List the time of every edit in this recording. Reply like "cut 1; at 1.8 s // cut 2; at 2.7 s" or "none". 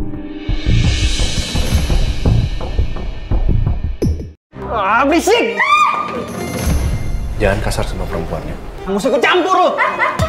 cut 1; at 4.4 s